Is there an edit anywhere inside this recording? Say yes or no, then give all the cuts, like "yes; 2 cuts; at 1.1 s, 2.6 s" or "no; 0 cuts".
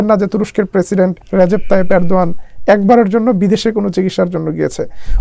yes; 1 cut; at 1.2 s